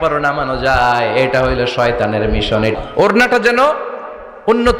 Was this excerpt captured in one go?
no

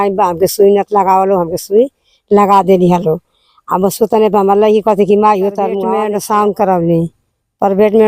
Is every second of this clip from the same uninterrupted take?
no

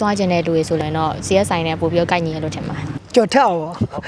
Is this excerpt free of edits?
no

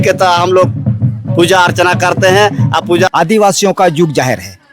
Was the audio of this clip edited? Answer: yes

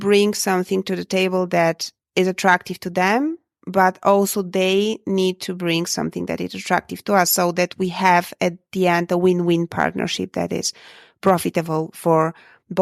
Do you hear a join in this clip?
no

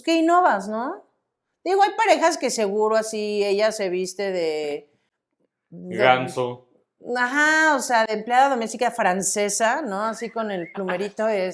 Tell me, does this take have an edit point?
no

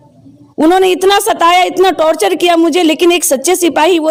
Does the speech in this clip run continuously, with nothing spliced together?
yes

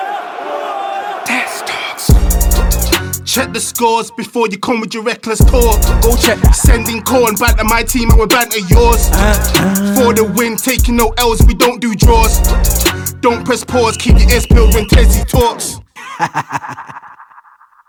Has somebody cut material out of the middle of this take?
no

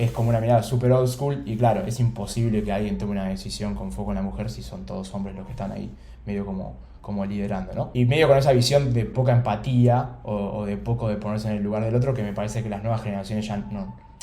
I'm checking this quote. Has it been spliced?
yes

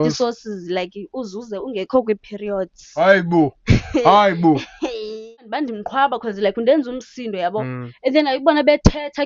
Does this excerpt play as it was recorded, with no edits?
no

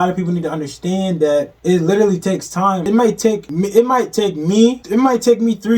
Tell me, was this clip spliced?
yes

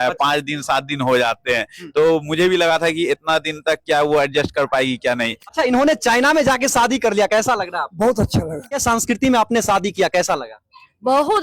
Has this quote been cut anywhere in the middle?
yes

